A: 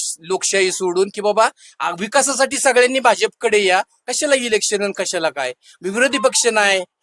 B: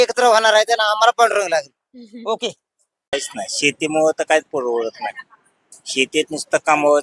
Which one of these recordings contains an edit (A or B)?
B